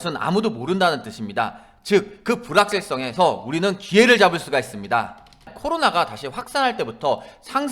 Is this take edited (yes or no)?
yes